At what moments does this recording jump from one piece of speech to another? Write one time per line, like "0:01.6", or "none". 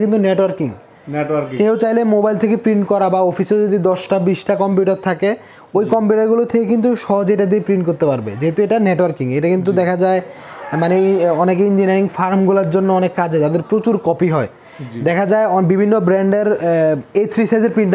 none